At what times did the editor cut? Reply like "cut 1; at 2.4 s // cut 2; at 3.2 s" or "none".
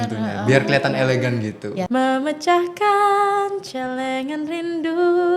cut 1; at 1.9 s